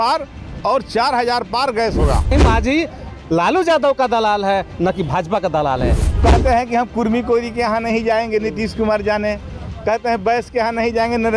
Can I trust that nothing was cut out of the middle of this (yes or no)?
no